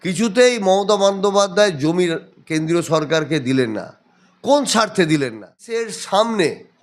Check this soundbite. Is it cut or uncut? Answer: cut